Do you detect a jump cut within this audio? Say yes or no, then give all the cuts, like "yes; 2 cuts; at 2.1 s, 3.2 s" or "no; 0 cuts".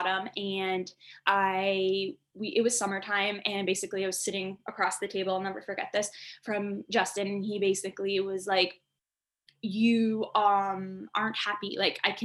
no; 0 cuts